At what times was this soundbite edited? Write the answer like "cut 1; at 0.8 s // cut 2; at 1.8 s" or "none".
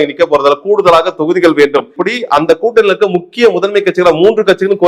cut 1; at 2.0 s